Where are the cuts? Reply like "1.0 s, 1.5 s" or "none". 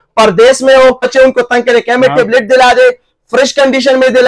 1.0 s